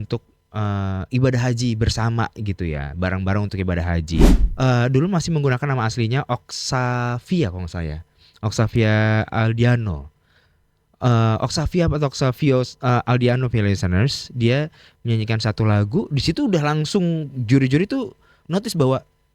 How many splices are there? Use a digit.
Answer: 1